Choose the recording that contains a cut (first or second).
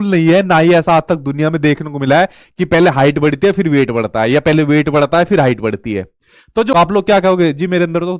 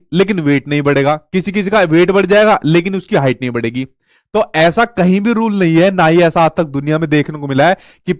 first